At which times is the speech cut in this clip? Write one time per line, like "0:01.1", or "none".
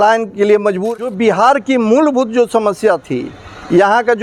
0:00.9